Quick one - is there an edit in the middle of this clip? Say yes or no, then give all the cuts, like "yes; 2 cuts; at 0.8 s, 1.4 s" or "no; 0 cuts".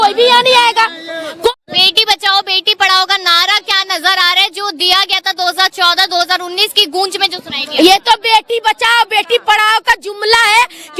yes; 1 cut; at 1.5 s